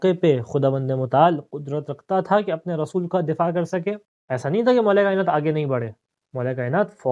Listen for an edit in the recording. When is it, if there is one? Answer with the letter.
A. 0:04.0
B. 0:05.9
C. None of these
A